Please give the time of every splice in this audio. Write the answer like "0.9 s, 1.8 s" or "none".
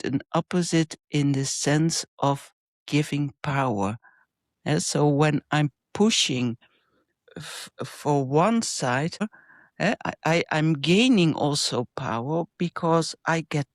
9.2 s